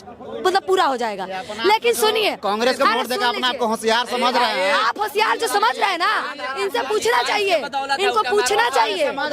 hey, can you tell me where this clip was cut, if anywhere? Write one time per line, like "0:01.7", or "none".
none